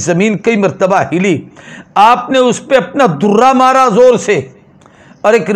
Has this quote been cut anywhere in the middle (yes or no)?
no